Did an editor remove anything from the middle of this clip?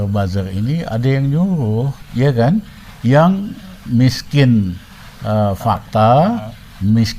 yes; 1 cut; at 2.0 s

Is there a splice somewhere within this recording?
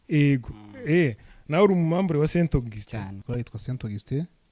yes; 1 cut; at 3.2 s

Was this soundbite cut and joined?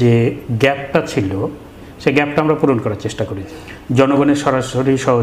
yes; 1 cut; at 3.5 s

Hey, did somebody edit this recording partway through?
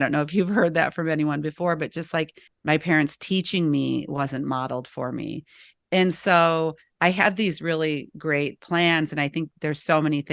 yes; 1 cut; at 2.4 s

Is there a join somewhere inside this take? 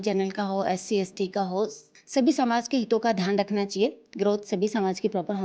yes; 1 cut; at 1.9 s

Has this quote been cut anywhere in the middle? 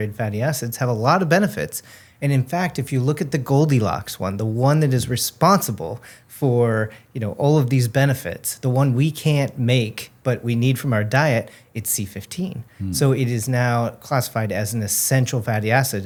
no; 0 cuts

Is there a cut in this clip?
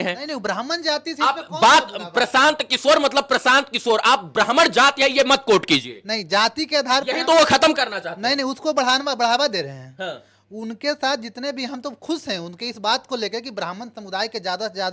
no; 0 cuts

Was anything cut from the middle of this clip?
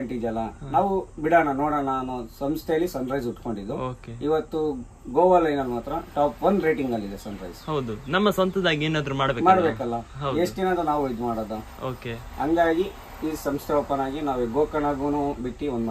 no; 0 cuts

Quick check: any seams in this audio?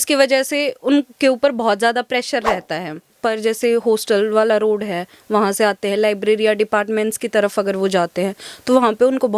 yes; 1 cut; at 3.1 s

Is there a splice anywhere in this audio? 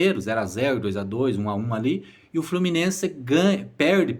no; 0 cuts

